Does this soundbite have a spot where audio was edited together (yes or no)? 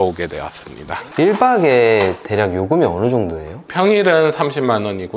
yes